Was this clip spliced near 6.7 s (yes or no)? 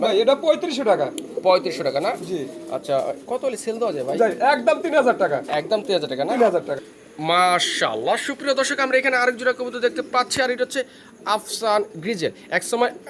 yes